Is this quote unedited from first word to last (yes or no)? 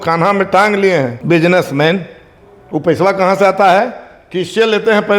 no